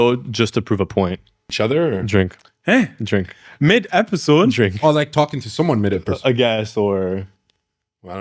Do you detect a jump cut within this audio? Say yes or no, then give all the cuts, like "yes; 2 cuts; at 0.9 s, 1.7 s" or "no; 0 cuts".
yes; 1 cut; at 1.5 s